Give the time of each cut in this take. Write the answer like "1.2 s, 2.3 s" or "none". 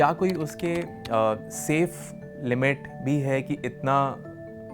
none